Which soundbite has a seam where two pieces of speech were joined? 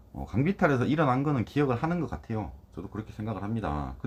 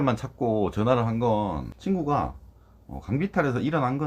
second; 1 cut; at 1.7 s

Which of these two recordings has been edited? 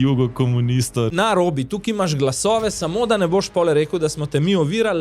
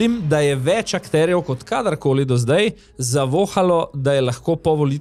first; 1 cut; at 1.1 s

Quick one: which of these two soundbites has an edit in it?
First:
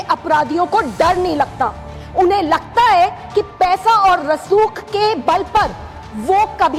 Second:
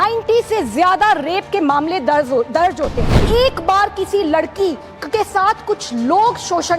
second; 1 cut; at 3.2 s

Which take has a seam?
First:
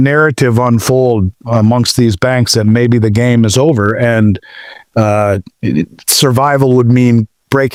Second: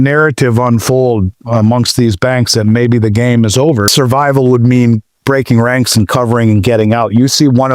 second; 1 cut; at 3.9 s

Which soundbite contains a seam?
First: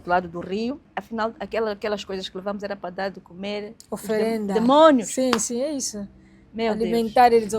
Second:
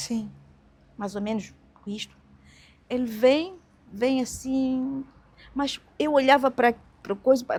first; 1 cut; at 0.9 s

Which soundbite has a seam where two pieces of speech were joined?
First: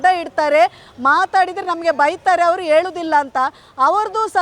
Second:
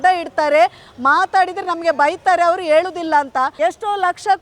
second; 1 cut; at 3.5 s

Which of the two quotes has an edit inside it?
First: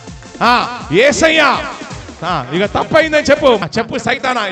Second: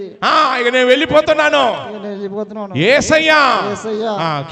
first; 1 cut; at 3.6 s

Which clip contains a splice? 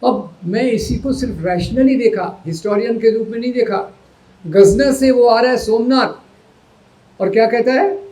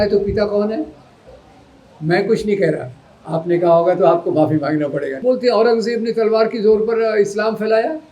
second; 1 cut; at 5.1 s

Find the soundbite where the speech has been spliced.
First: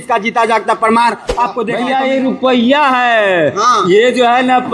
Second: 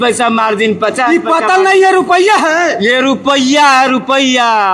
first; 1 cut; at 1.7 s

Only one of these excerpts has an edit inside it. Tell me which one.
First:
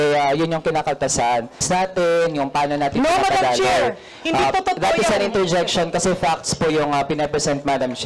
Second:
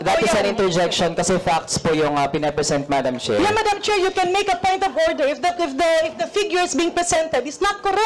first; 1 cut; at 1.6 s

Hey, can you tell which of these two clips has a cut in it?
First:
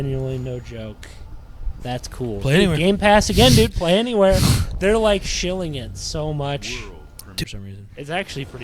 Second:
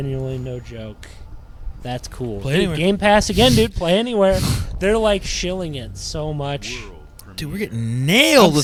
first; 1 cut; at 7.4 s

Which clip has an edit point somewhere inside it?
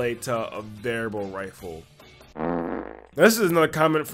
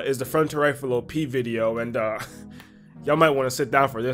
first; 1 cut; at 3.0 s

